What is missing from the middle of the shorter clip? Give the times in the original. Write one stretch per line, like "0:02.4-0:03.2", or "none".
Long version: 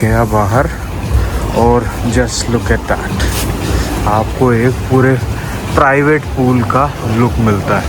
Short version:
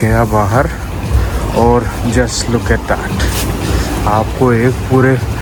none